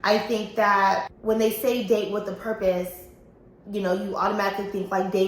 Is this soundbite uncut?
no; 1 cut; at 1.1 s

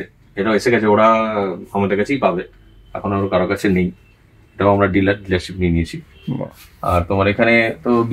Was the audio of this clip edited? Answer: no; 0 cuts

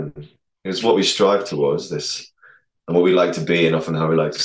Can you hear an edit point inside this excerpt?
no; 0 cuts

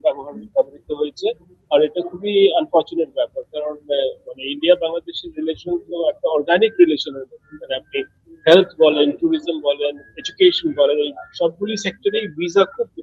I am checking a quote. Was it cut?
no; 0 cuts

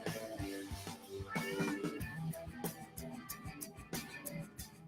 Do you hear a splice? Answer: no; 0 cuts

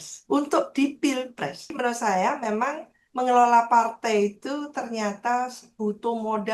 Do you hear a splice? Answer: yes; 1 cut; at 1.7 s

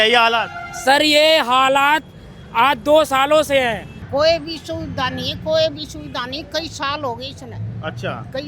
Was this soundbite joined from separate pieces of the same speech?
yes; 1 cut; at 3.9 s

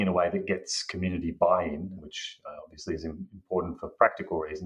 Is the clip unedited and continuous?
no; 1 cut; at 2.0 s

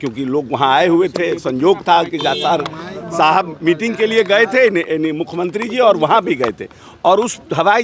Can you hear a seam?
no; 0 cuts

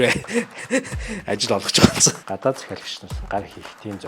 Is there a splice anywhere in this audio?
yes; 1 cut; at 2.2 s

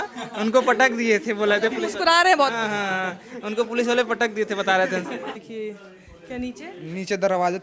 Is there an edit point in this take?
yes; 1 cut; at 5.4 s

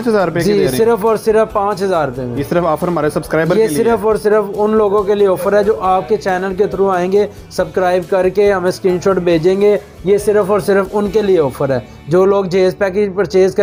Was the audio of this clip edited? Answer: no; 0 cuts

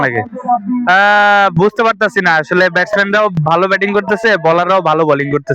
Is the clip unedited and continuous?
yes; 0 cuts

